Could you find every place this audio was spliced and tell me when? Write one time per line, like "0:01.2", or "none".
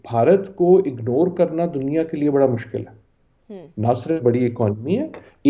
none